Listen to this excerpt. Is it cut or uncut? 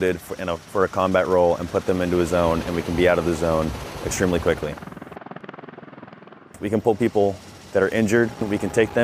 uncut